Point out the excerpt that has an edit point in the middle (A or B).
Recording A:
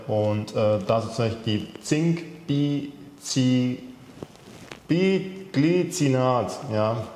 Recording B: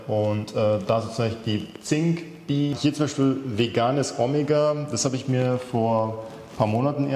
B